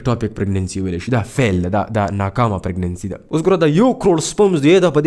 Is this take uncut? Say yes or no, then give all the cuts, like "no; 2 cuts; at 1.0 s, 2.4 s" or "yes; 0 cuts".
no; 1 cut; at 3.2 s